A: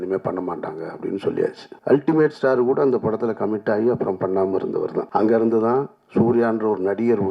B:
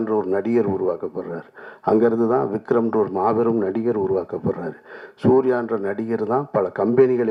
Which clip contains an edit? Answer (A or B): A